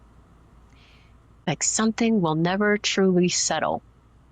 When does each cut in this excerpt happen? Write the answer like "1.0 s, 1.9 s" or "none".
1.5 s